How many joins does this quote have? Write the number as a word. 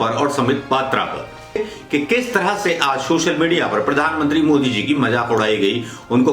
one